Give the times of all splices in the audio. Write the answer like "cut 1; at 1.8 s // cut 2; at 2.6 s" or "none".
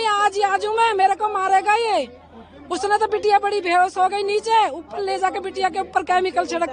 none